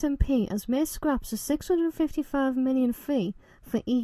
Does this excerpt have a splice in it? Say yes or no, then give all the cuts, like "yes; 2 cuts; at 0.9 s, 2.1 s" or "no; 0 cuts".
no; 0 cuts